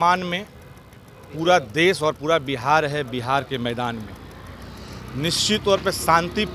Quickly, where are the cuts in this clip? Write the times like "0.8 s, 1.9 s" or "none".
none